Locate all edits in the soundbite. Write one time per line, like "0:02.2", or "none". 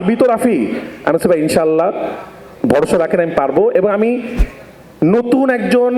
0:04.4